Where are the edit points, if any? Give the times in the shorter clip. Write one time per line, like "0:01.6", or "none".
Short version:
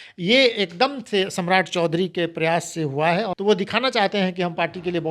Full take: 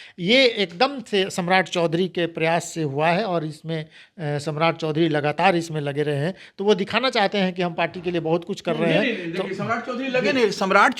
0:03.3